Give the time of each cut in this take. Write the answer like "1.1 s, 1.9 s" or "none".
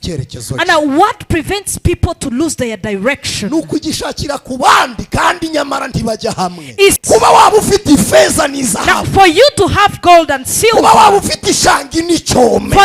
7.0 s